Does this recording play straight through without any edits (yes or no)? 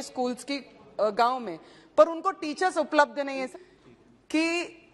no